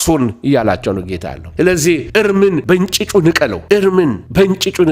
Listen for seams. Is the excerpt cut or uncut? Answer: uncut